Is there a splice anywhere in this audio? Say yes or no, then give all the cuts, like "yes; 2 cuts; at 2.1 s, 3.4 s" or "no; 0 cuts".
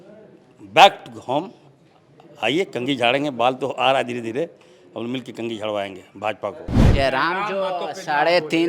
yes; 1 cut; at 6.9 s